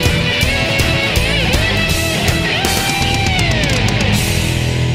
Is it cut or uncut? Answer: uncut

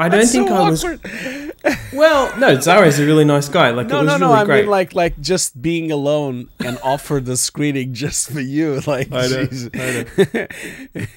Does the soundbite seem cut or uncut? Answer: uncut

